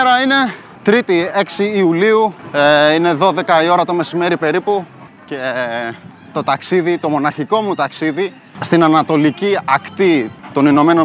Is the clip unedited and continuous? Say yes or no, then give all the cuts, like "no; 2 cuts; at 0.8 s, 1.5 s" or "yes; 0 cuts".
yes; 0 cuts